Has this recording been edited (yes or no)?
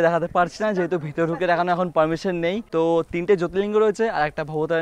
yes